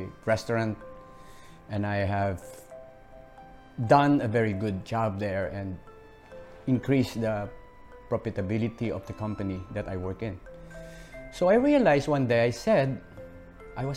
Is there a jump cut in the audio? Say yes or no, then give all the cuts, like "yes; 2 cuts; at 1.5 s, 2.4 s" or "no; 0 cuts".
no; 0 cuts